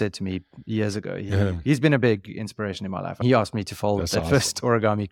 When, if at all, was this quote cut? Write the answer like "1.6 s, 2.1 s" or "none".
none